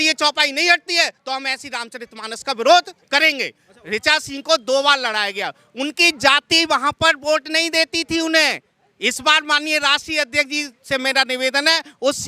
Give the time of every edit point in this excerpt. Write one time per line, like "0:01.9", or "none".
0:03.7

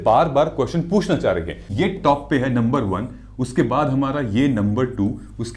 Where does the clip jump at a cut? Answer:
0:01.7

